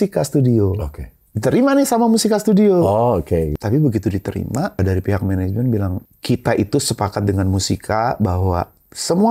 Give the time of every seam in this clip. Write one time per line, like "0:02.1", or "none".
0:03.5
0:04.8
0:06.0

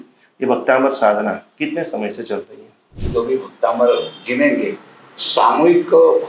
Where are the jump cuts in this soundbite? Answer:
0:03.0

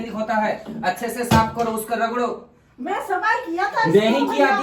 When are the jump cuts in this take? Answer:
none

